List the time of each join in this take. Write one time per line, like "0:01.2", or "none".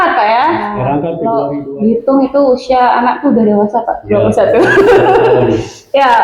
0:01.2